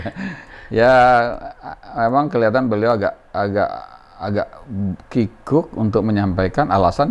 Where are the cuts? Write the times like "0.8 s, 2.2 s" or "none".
none